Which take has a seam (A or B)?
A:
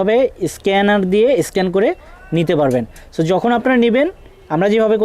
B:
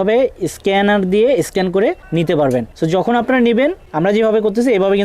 B